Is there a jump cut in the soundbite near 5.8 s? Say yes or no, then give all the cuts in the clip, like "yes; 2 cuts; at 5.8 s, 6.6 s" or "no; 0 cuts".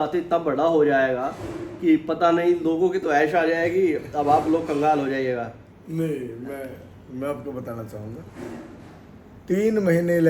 no; 0 cuts